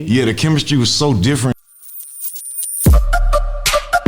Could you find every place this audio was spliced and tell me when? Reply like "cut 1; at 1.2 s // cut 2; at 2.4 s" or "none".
cut 1; at 1.5 s